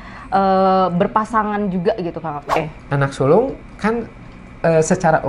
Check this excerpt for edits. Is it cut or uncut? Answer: cut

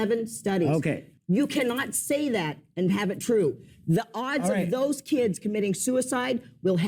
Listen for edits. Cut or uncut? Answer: cut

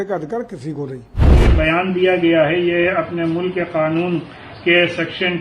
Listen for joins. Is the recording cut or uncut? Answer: cut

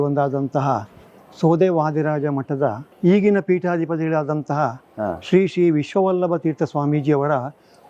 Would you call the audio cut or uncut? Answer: cut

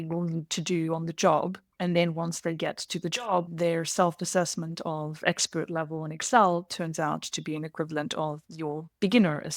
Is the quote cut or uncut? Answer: cut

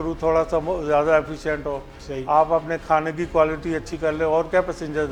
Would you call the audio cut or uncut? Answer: uncut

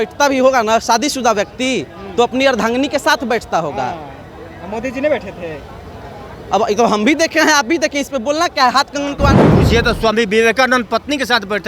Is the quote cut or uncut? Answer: cut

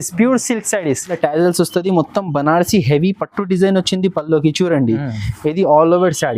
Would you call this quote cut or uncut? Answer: cut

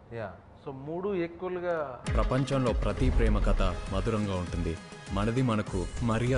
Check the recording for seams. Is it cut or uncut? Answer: cut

